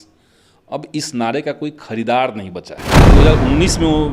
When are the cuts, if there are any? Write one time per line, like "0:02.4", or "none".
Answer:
0:03.1